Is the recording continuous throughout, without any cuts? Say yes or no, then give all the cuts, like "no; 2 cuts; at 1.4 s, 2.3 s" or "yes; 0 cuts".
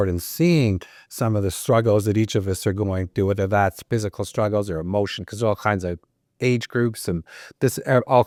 yes; 0 cuts